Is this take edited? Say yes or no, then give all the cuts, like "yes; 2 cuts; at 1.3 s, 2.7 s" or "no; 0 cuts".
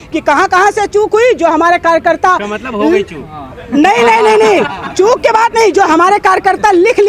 no; 0 cuts